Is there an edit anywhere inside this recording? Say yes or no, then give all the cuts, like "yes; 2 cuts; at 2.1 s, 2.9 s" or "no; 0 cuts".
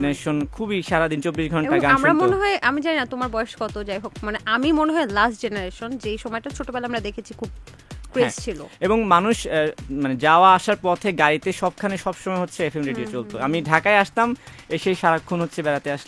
no; 0 cuts